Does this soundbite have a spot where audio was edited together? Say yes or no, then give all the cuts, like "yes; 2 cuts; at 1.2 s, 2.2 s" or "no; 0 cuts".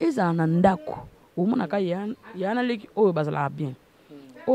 no; 0 cuts